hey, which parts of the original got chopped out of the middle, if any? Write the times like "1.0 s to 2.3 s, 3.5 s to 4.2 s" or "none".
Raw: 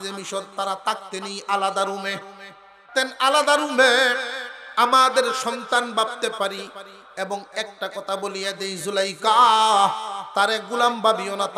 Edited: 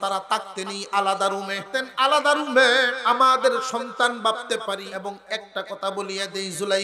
2.1 s to 2.8 s, 4.2 s to 4.7 s, 6.6 s to 7.2 s